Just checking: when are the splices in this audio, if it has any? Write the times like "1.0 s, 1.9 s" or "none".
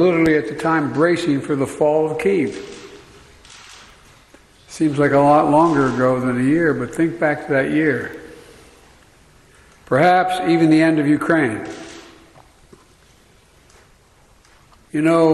none